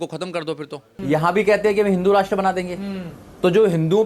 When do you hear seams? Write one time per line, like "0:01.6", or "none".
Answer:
0:00.9